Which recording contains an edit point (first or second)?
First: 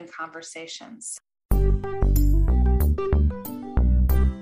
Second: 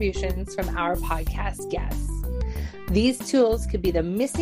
first